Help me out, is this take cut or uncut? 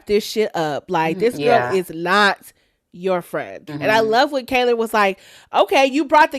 cut